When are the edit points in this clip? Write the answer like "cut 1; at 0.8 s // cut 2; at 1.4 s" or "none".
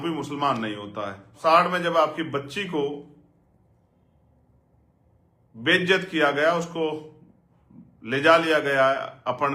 cut 1; at 1.4 s